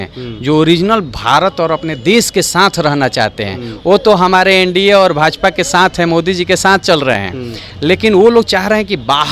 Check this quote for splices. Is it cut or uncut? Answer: uncut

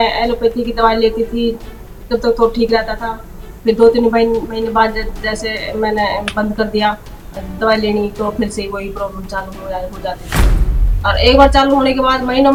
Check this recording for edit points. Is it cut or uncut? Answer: uncut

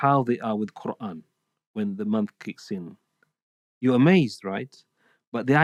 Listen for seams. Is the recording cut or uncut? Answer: uncut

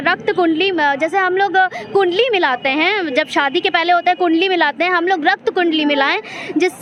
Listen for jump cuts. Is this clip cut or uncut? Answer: uncut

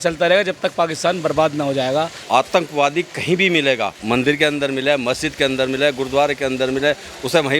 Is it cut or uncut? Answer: cut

